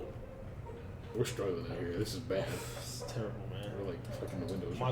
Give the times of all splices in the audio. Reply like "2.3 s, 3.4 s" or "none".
1.0 s